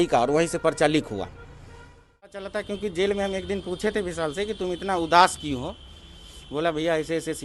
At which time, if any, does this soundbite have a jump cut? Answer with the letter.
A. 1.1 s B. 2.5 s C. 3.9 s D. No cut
B